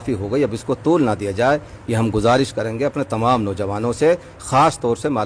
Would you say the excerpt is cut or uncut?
uncut